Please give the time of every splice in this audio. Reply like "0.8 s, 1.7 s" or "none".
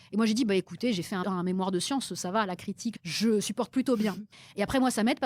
1.2 s, 3.0 s, 4.3 s